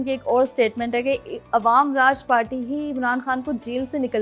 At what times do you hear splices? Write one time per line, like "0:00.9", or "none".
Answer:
none